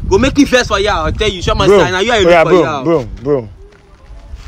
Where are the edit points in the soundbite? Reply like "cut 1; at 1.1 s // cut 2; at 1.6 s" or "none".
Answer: none

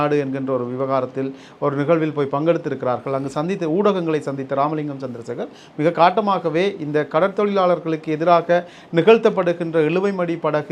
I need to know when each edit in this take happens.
none

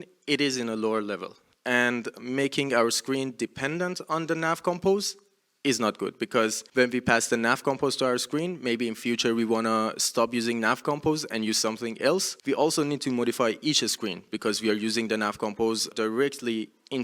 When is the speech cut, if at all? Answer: cut 1; at 6.6 s // cut 2; at 12.3 s // cut 3; at 15.9 s

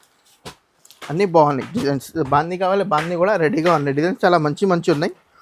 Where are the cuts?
none

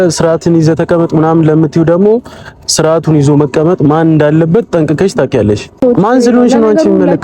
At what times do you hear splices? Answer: cut 1; at 5.8 s

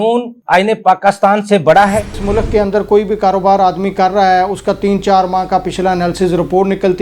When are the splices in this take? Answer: cut 1; at 2.1 s

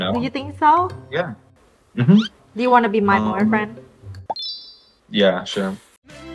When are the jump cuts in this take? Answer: cut 1; at 2.4 s

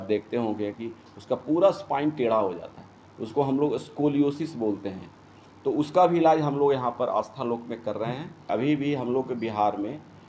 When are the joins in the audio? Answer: cut 1; at 8.5 s

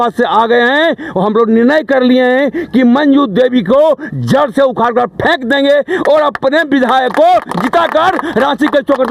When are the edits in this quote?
none

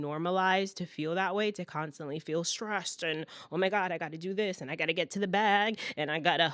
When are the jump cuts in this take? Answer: none

